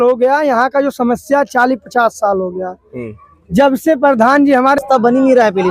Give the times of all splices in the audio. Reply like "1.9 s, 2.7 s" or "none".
4.8 s